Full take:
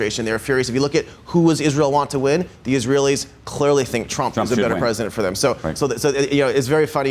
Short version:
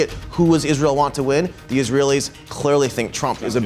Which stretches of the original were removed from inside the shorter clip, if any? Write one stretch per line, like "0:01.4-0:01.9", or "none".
none